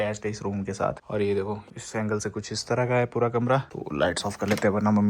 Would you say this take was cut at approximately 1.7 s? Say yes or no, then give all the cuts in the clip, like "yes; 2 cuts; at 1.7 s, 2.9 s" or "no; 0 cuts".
yes; 3 cuts; at 1.0 s, 1.7 s, 3.7 s